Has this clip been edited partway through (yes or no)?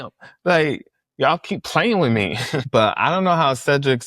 no